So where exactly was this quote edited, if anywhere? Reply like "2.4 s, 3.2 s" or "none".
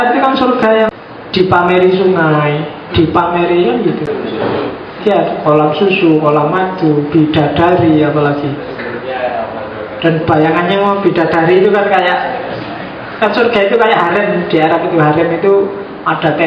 0.9 s, 4.1 s